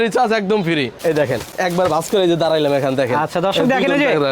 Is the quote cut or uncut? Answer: cut